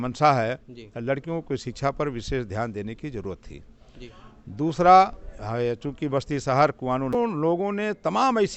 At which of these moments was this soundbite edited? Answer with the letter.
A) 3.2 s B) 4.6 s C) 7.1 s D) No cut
C